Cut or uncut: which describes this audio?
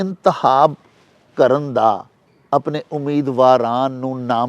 uncut